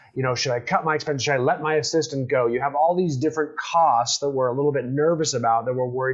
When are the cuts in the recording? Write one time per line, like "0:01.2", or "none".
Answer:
none